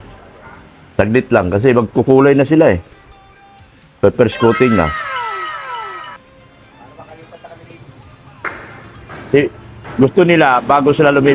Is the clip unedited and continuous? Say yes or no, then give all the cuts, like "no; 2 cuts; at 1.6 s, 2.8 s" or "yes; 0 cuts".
yes; 0 cuts